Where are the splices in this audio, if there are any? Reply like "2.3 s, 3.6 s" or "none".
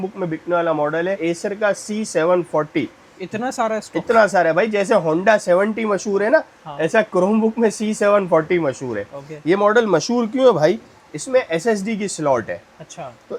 none

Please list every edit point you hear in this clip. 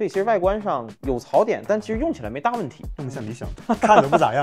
none

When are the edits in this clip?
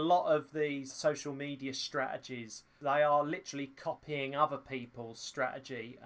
1.0 s, 2.6 s

